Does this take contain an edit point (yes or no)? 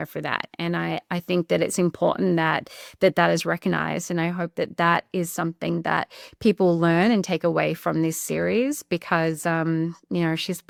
no